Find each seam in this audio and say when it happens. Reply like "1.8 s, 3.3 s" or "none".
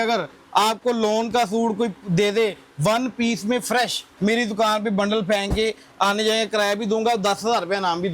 4.1 s